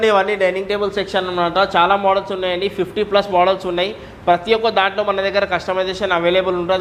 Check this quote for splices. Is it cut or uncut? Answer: uncut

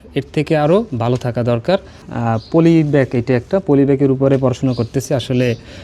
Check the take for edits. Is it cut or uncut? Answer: cut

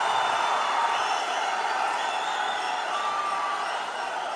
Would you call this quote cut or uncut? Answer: uncut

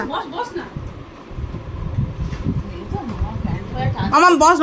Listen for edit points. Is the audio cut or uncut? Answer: uncut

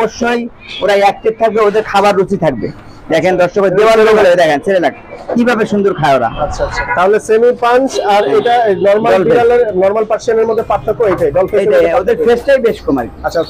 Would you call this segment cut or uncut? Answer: cut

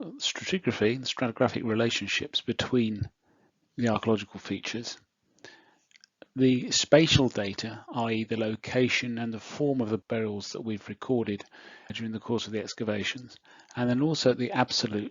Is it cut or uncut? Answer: cut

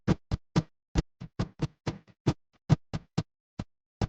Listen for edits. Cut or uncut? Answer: uncut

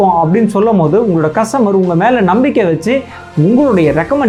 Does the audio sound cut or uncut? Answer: uncut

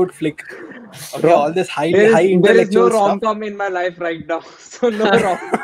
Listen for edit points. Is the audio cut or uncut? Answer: uncut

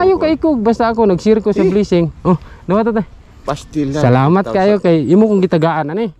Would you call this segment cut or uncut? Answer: uncut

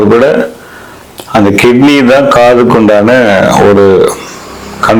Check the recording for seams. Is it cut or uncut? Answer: uncut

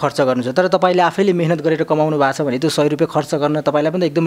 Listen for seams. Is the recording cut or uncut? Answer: uncut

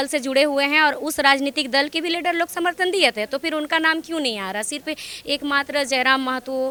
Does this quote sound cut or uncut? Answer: uncut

